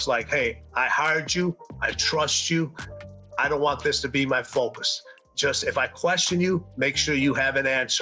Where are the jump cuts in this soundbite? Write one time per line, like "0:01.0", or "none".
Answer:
none